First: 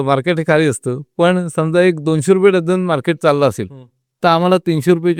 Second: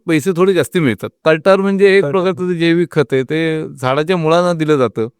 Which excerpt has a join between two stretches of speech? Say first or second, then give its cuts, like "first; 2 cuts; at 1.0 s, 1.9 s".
second; 1 cut; at 1.1 s